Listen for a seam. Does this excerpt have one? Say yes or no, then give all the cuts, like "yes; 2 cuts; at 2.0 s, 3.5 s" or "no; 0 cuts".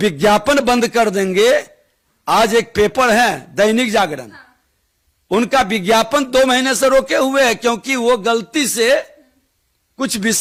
no; 0 cuts